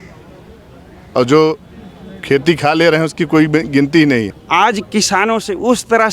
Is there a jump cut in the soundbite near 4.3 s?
yes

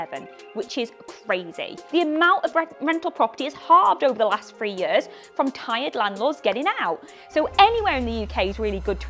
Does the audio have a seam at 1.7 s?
yes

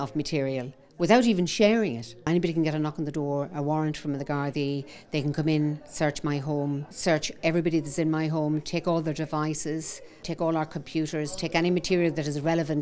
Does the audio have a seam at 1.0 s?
no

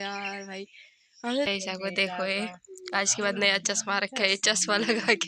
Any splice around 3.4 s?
no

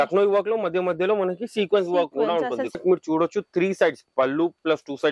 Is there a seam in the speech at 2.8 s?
yes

